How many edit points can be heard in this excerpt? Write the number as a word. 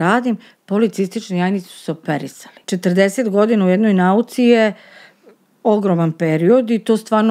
one